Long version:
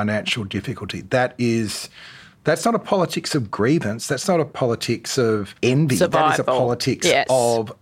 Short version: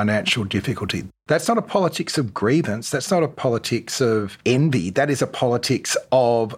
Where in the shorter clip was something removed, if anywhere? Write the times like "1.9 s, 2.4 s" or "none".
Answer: 0.9 s